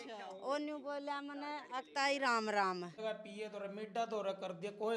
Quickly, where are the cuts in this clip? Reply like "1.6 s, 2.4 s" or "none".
2.9 s